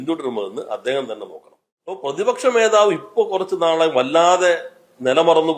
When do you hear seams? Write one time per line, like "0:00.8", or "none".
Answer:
0:02.0